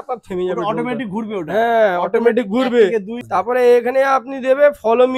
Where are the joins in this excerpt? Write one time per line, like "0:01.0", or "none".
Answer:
0:03.2